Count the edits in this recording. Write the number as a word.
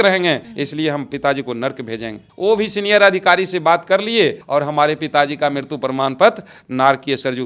zero